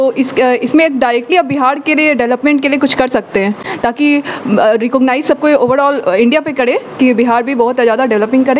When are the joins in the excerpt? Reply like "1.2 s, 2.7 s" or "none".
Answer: none